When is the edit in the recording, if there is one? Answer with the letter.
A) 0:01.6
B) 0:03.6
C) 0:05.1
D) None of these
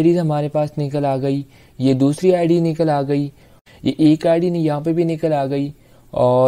B